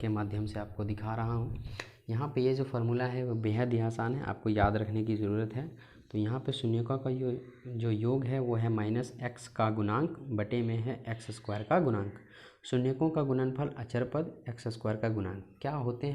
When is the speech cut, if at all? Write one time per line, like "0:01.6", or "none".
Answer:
none